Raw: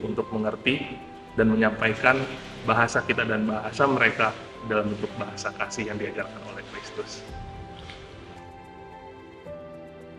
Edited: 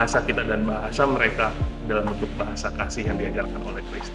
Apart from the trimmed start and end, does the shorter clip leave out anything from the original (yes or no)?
no